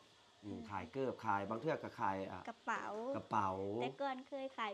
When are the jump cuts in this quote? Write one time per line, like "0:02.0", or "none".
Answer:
none